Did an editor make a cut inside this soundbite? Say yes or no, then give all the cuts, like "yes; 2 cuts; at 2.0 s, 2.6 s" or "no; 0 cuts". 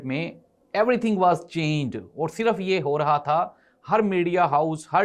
no; 0 cuts